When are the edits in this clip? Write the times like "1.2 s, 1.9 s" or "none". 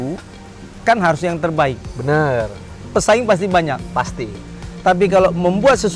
none

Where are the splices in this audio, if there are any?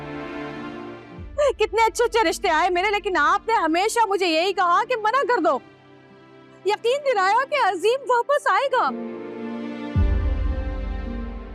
1.0 s, 8.9 s

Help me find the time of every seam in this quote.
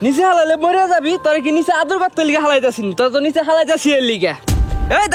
none

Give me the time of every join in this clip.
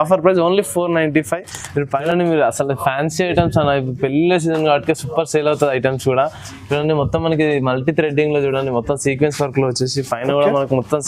1.9 s

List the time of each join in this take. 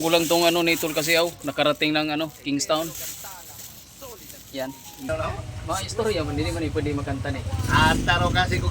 5.1 s

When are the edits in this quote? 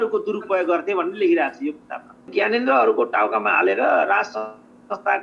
2.3 s

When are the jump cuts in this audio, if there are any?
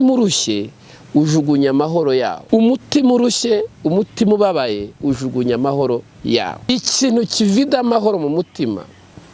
2.4 s, 6.7 s

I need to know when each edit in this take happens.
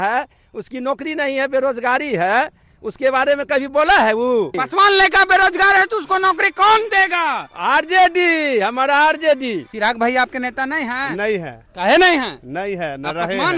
4.6 s, 9.7 s

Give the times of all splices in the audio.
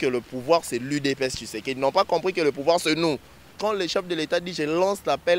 3.5 s

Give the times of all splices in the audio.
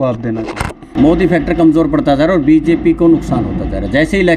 0.9 s

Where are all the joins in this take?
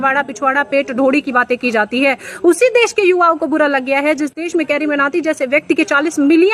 none

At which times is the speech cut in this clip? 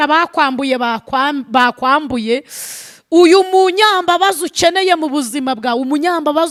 none

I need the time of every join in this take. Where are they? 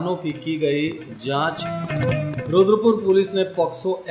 none

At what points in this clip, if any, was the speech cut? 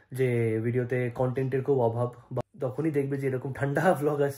2.3 s

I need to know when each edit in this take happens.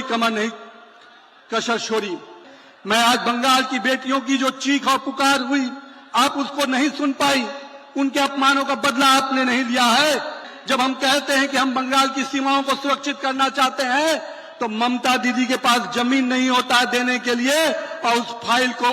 2.4 s, 10.5 s

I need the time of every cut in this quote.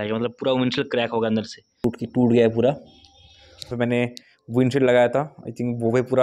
1.8 s, 3.6 s

